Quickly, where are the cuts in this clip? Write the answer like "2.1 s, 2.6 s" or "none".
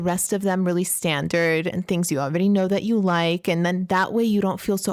none